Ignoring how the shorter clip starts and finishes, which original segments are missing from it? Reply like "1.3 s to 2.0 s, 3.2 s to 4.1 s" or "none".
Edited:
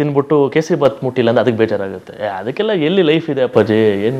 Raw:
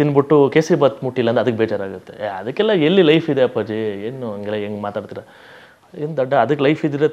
none